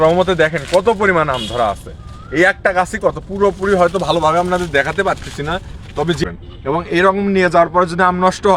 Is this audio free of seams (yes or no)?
no